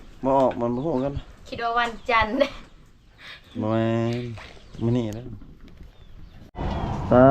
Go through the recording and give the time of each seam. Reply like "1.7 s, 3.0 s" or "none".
6.4 s